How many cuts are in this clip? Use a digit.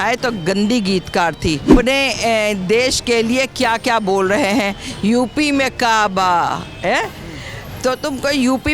1